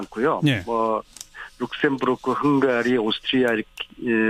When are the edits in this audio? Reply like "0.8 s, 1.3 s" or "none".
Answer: none